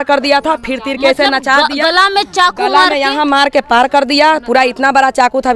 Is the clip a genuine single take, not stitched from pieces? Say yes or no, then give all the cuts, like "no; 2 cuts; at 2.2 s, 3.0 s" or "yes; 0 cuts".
yes; 0 cuts